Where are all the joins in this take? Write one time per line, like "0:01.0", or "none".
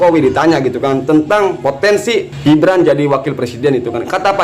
0:02.3

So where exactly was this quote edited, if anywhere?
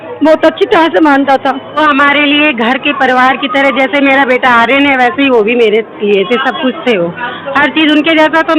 0:01.8

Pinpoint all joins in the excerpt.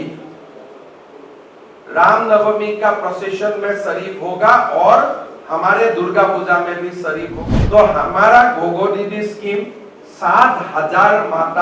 0:07.4

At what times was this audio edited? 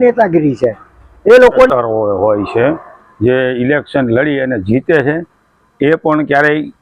0:01.7

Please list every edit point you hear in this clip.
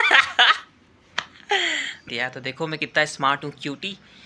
0:02.0

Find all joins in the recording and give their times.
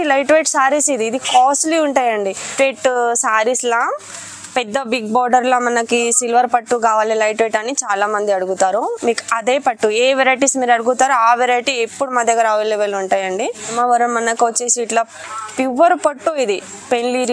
0:02.5
0:13.7

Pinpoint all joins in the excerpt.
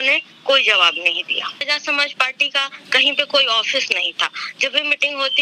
0:01.7

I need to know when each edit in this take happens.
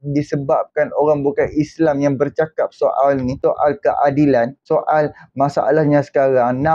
0:03.3
0:04.6

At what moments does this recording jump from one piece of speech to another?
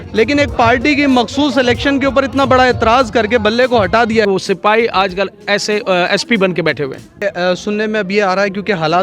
0:04.2
0:07.2

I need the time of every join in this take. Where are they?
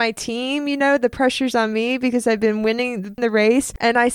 0:03.1

